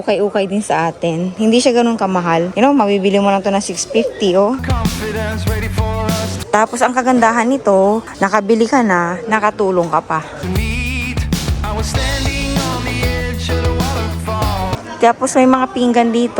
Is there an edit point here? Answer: no; 0 cuts

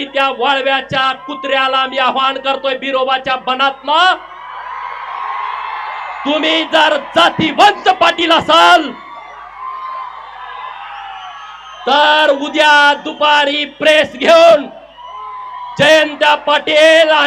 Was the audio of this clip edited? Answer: no; 0 cuts

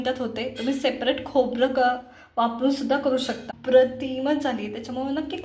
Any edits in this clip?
yes; 1 cut; at 3.5 s

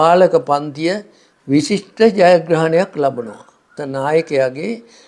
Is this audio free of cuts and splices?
no; 1 cut; at 3.6 s

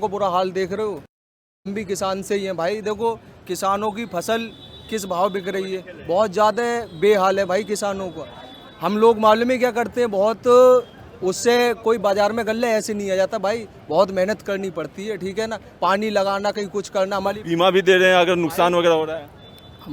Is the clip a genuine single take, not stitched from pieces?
yes; 0 cuts

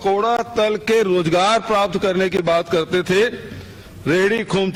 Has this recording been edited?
no; 0 cuts

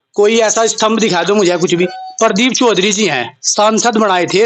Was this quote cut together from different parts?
yes; 1 cut; at 2.0 s

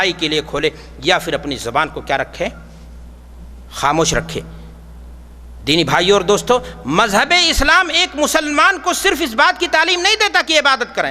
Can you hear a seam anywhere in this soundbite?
no; 0 cuts

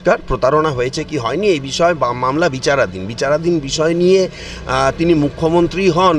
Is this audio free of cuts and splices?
yes; 0 cuts

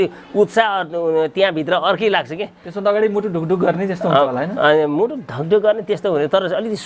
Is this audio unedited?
yes; 0 cuts

